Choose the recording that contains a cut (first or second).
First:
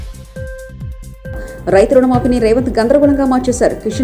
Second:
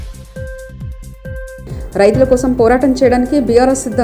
first